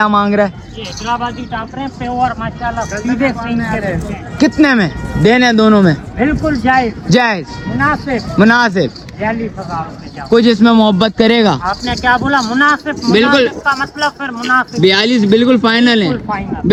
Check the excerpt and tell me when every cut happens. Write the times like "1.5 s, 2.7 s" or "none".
none

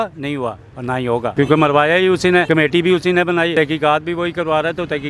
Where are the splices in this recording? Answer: 1.3 s, 2.5 s, 3.5 s

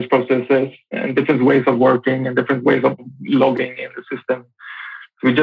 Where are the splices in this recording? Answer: 1.0 s, 3.0 s

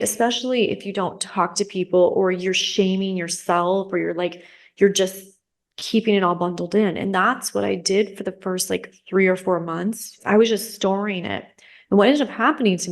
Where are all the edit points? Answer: 10.2 s

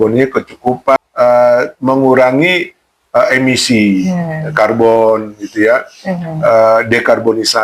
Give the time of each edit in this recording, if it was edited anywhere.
1.0 s

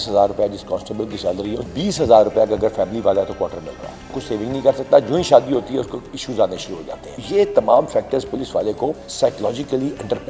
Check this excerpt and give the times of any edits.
1.7 s, 4.3 s, 7.2 s, 9.1 s

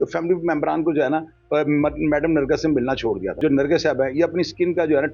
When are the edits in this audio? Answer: 3.4 s

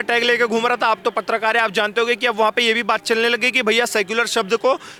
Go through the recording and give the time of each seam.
none

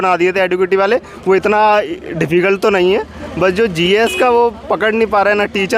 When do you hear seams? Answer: none

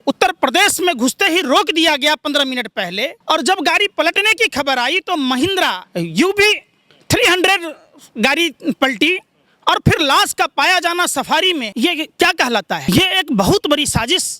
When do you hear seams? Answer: 3.2 s, 5.8 s, 11.7 s, 12.8 s

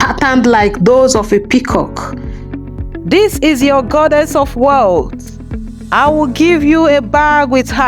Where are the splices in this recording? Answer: 2.5 s

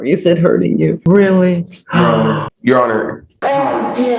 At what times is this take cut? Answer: 1.0 s, 2.5 s, 3.2 s

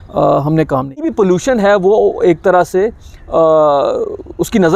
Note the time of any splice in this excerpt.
1.1 s

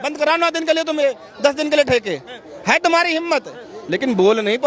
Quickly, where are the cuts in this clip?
none

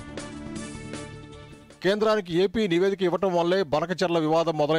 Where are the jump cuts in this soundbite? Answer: none

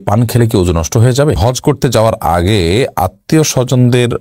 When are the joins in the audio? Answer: 1.4 s

